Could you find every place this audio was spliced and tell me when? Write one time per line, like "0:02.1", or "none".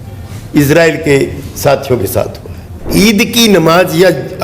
0:02.9